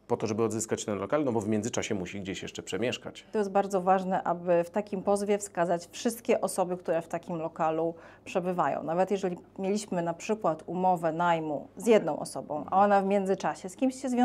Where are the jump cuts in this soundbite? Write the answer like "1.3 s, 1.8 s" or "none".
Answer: 3.3 s